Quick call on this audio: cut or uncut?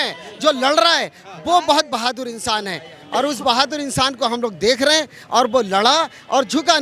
uncut